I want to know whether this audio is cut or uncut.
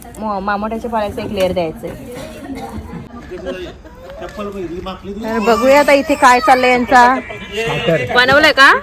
uncut